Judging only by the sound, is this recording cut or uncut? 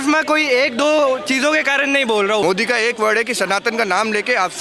cut